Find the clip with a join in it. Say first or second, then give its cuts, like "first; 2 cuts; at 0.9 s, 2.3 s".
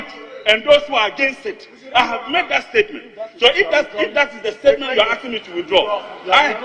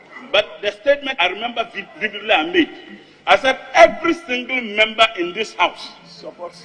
second; 1 cut; at 1.1 s